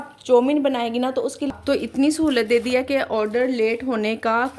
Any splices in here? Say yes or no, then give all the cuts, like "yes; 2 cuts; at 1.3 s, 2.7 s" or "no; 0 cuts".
yes; 1 cut; at 1.5 s